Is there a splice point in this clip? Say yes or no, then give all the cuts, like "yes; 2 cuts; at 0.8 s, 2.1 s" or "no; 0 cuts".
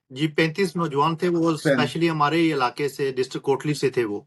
no; 0 cuts